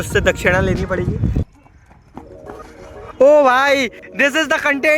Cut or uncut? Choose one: cut